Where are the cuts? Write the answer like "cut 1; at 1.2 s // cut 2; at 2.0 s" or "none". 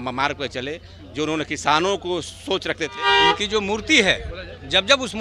cut 1; at 3.0 s